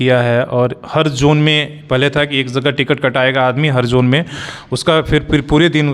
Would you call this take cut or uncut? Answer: uncut